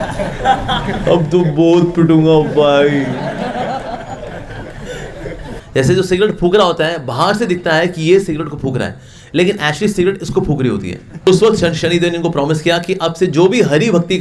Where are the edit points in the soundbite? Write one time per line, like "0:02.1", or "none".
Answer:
0:05.6
0:11.3